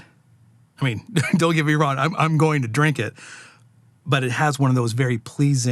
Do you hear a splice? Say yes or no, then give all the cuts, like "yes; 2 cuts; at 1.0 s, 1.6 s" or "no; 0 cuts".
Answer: no; 0 cuts